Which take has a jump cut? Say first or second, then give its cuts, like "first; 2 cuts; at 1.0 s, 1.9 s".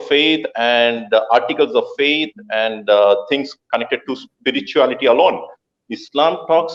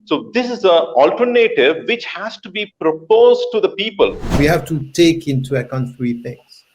second; 1 cut; at 4.2 s